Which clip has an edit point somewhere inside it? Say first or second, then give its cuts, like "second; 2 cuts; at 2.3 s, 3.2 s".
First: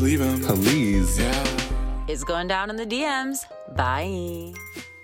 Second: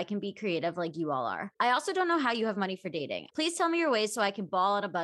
second; 2 cuts; at 1.4 s, 3.2 s